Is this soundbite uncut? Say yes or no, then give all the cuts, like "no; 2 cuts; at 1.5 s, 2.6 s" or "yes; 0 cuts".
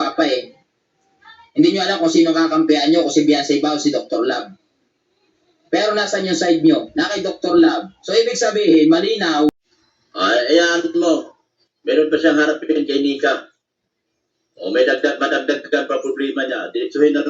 no; 1 cut; at 9.5 s